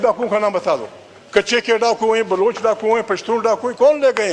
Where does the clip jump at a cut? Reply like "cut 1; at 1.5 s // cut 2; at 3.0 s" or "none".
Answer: none